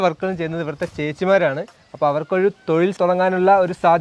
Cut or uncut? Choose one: cut